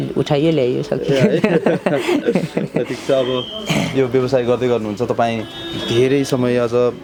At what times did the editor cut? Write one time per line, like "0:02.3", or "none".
none